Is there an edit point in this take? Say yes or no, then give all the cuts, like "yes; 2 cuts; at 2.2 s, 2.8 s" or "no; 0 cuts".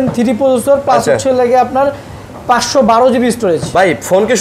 no; 0 cuts